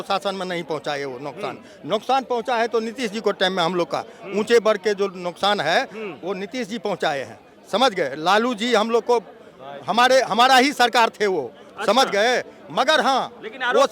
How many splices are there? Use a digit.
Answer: 0